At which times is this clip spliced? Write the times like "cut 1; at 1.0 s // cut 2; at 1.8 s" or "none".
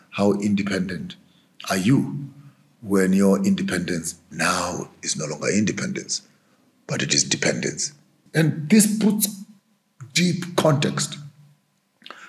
cut 1; at 8.1 s